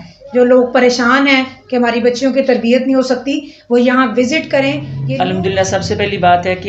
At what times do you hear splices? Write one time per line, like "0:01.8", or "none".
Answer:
0:04.9